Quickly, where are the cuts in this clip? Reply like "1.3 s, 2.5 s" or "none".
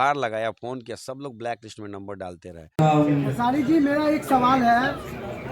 2.6 s